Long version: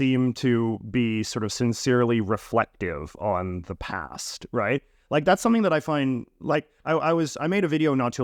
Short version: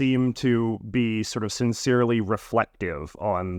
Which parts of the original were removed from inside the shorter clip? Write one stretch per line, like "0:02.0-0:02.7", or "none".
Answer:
none